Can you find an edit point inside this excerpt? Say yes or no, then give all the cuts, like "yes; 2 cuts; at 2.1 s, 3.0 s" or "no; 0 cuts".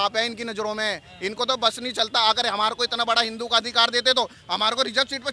no; 0 cuts